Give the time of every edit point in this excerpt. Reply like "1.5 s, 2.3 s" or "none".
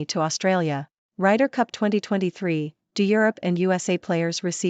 1.1 s